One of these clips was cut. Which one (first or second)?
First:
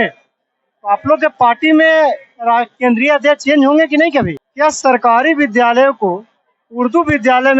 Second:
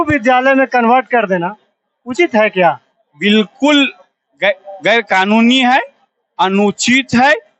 first